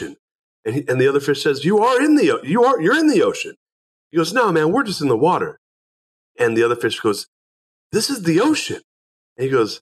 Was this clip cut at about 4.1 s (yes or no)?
no